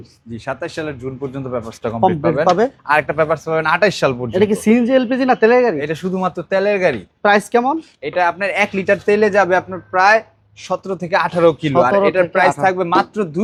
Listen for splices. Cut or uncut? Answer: uncut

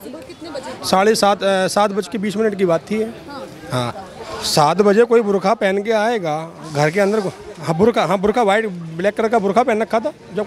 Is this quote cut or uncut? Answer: cut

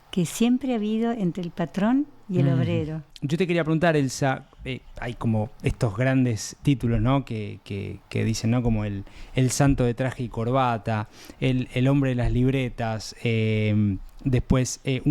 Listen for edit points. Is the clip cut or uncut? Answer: cut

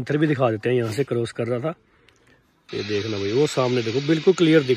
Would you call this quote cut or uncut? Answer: uncut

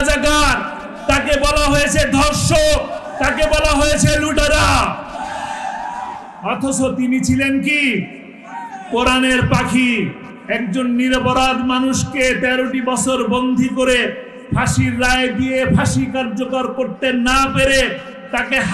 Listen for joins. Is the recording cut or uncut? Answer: uncut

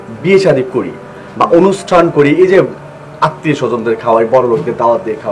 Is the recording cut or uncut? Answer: uncut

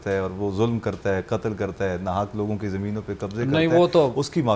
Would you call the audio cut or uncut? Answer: uncut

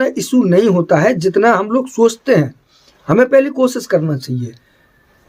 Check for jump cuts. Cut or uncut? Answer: uncut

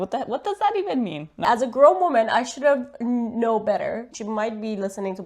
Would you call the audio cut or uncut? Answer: cut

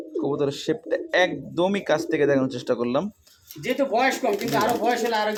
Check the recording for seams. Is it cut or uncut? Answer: uncut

